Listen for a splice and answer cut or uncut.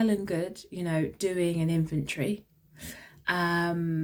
uncut